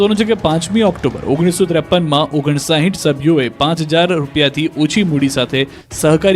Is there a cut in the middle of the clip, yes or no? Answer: yes